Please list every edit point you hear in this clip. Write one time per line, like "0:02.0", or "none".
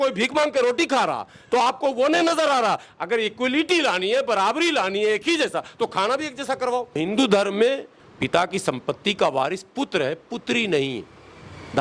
0:07.0

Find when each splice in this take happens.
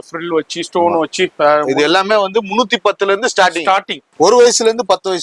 0:04.0

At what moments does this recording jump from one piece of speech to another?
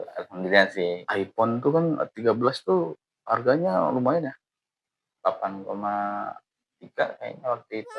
0:01.0

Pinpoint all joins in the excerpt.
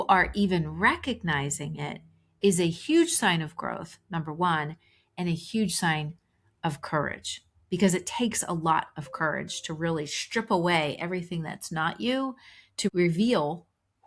0:12.9

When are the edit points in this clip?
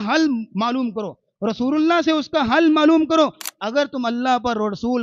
0:03.5

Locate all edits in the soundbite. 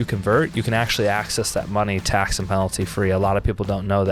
none

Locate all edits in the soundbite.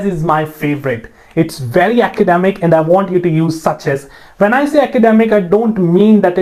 none

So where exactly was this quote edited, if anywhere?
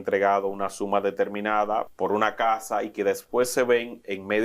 0:01.9

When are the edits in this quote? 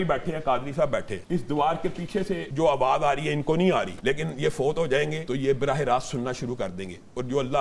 0:01.2
0:02.5
0:03.9
0:05.2

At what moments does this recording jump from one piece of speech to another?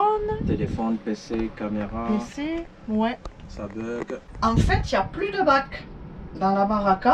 0:04.2

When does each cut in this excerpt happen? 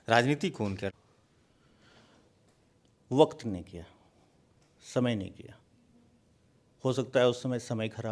0:00.9

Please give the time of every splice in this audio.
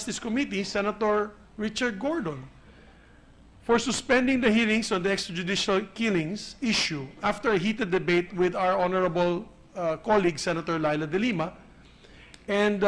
0:05.3

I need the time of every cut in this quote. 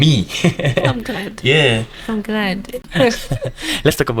0:02.9

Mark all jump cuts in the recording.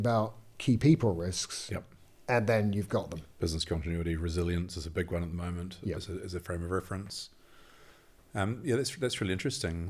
none

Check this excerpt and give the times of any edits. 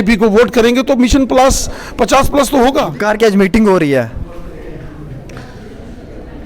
0:02.9

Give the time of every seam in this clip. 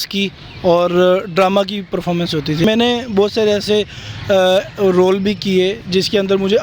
0:02.6

